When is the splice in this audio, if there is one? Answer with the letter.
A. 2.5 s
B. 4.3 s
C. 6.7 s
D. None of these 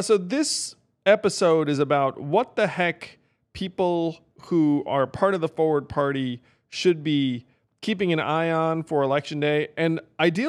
D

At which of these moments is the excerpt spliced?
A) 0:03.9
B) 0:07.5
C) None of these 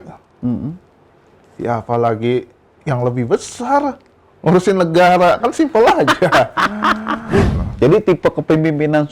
B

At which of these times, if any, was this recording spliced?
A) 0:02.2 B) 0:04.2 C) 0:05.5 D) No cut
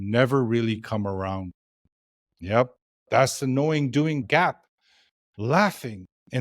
B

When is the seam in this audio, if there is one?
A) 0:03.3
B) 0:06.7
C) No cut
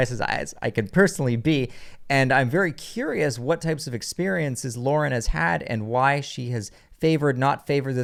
C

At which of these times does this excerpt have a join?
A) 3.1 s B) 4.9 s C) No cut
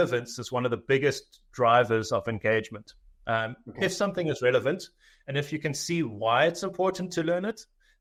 C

